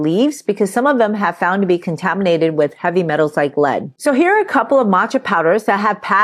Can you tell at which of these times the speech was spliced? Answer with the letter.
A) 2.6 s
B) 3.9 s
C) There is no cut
B